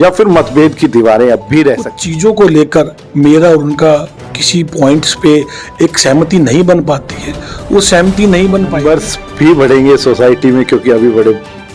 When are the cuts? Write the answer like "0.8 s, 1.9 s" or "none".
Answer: 2.0 s, 8.8 s